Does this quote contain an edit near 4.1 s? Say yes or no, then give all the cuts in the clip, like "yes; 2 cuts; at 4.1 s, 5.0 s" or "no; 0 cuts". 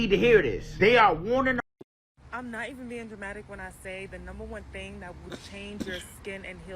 no; 1 cut; at 1.6 s